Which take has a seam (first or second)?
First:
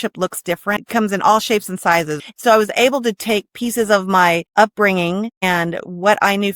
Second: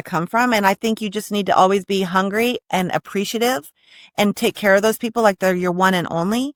first